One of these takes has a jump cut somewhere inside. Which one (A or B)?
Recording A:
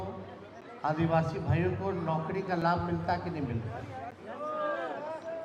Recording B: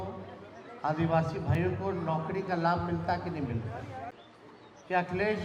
B